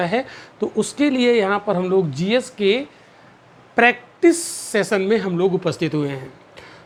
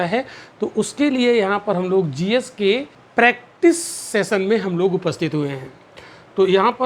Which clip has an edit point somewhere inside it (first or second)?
second